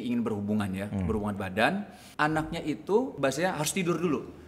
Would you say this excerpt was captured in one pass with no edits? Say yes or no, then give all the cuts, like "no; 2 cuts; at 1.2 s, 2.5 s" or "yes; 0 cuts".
no; 2 cuts; at 2.0 s, 3.1 s